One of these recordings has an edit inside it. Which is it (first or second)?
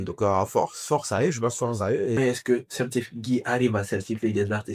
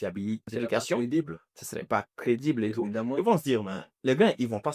first